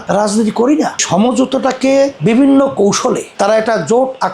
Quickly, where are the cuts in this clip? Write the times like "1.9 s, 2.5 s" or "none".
1.0 s, 3.3 s